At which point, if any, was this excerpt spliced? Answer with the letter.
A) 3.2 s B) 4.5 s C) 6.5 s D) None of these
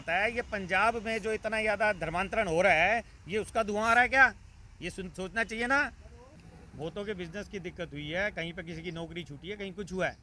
C